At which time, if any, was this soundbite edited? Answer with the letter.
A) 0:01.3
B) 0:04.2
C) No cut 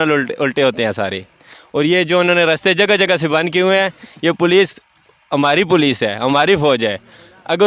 C